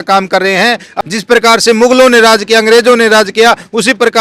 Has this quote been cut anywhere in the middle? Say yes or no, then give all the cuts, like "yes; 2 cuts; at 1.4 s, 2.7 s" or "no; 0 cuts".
yes; 1 cut; at 1.0 s